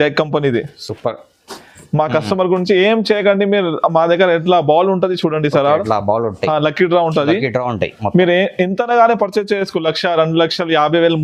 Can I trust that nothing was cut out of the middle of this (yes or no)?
yes